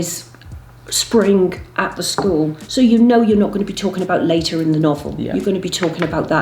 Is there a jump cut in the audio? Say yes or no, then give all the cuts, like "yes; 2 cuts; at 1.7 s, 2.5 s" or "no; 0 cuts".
no; 0 cuts